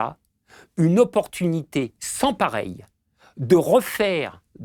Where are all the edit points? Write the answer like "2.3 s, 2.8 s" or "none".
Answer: none